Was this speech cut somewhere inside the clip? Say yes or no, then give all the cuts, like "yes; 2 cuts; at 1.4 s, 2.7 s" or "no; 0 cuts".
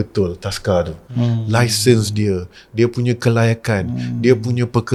no; 0 cuts